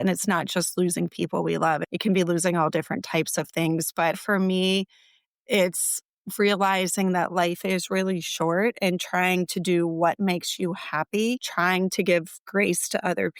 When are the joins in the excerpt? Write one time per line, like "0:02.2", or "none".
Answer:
0:01.8
0:04.2